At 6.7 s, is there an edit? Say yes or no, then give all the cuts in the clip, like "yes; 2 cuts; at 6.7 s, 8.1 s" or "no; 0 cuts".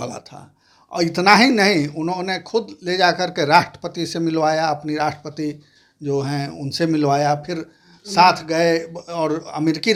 no; 0 cuts